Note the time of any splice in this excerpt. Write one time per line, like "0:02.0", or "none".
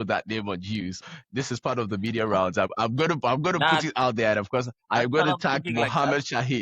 0:01.0
0:02.7